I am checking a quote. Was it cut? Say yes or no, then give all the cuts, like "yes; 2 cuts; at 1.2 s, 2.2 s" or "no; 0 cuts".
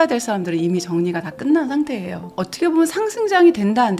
yes; 1 cut; at 2.3 s